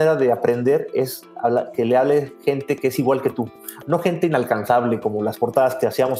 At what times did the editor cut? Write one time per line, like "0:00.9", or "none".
none